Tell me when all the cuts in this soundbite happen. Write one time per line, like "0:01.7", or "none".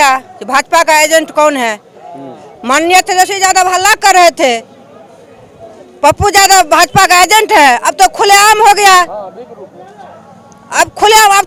none